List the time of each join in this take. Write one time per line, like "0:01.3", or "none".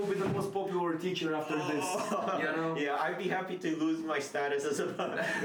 none